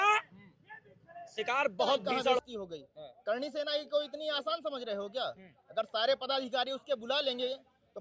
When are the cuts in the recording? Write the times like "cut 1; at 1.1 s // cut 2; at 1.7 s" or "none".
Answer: cut 1; at 2.4 s